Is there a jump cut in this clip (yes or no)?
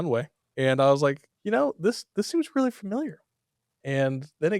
yes